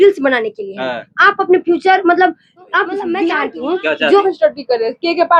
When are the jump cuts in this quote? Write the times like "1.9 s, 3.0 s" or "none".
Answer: 4.2 s

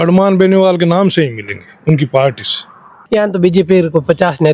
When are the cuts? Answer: 3.0 s

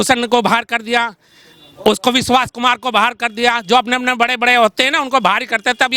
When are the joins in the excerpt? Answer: none

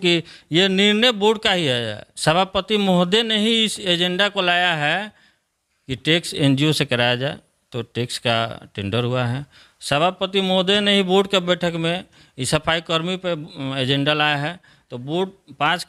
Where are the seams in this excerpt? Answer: none

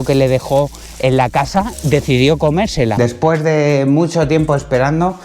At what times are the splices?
3.0 s

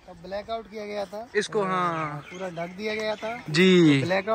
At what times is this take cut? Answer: none

